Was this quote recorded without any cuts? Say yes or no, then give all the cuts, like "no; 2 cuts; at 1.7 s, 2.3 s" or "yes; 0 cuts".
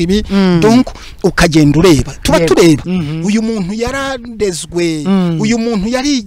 no; 1 cut; at 2.9 s